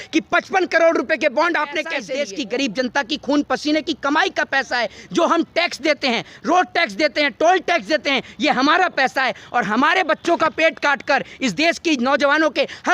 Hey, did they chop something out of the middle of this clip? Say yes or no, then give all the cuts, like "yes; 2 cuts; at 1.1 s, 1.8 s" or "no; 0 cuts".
yes; 1 cut; at 2.0 s